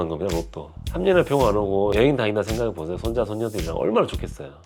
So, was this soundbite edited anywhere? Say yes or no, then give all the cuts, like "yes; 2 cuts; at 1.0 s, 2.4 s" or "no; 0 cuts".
no; 0 cuts